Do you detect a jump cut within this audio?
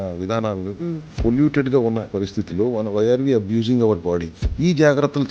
yes; 2 cuts; at 1.2 s, 4.4 s

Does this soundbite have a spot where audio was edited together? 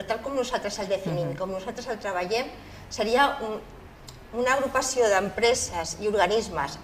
no; 0 cuts

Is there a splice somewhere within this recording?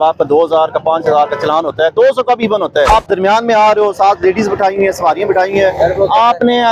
yes; 1 cut; at 2.9 s

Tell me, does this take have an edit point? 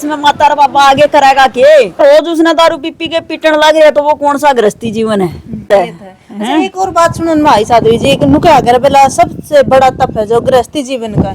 yes; 2 cuts; at 2.0 s, 5.7 s

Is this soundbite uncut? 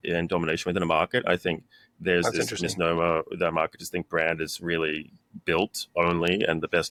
yes; 0 cuts

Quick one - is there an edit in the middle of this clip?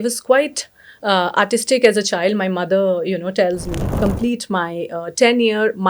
yes; 1 cut; at 4.0 s

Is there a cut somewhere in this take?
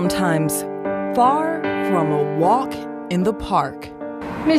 no; 0 cuts

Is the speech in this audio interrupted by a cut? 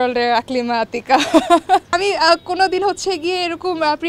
yes; 1 cut; at 1.9 s

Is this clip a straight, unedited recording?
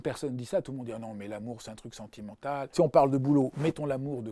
no; 1 cut; at 2.7 s

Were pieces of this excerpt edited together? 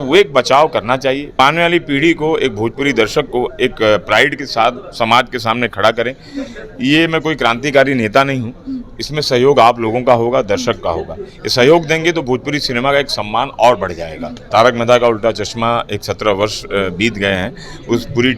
yes; 2 cuts; at 1.4 s, 14.4 s

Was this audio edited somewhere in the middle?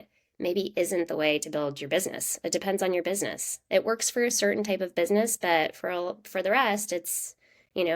no; 0 cuts

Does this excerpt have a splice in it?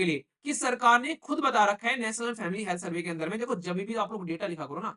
no; 0 cuts

